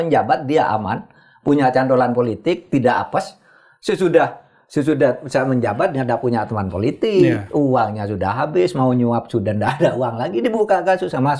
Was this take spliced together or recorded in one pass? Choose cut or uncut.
uncut